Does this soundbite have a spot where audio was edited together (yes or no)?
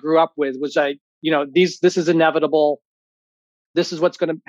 no